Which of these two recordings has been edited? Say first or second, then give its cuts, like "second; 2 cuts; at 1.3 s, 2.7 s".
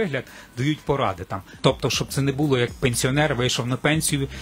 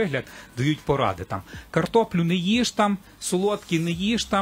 first; 1 cut; at 1.5 s